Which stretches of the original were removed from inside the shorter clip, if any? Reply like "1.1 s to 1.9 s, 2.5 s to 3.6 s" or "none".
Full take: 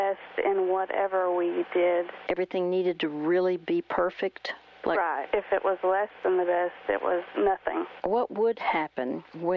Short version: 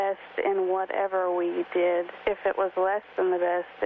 2.2 s to 5.2 s

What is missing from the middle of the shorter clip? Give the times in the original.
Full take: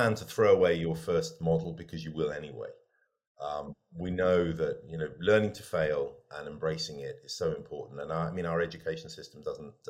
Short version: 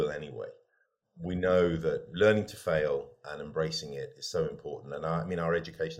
3.3 s to 3.8 s, 4.8 s to 5.1 s

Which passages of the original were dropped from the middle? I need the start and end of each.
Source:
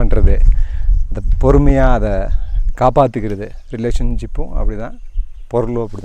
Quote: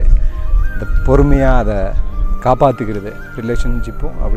none

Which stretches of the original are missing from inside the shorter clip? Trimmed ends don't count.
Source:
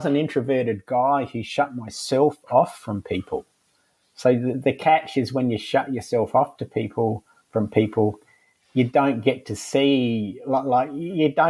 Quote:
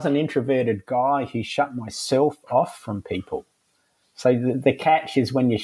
none

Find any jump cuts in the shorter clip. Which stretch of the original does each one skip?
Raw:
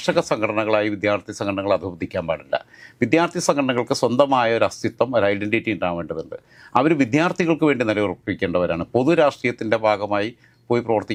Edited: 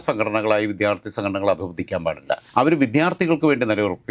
2.7 s to 6.6 s

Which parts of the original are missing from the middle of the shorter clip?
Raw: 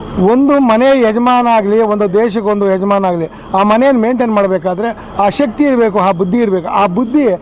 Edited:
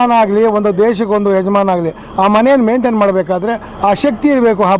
none

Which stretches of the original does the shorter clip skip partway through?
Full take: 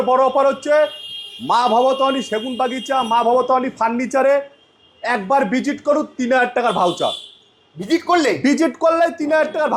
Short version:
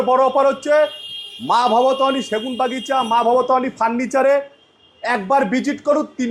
none

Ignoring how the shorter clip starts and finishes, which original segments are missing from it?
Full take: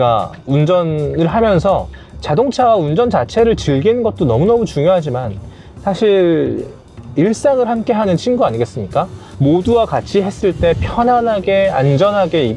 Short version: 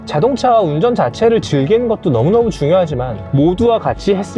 5.3 s to 9.2 s

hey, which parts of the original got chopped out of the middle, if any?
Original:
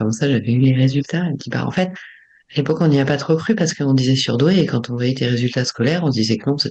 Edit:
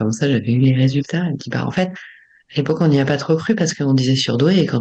none

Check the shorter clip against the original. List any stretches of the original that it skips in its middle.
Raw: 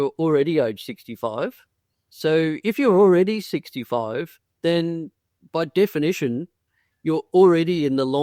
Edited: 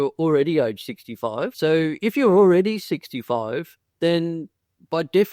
1.5 s to 2.1 s

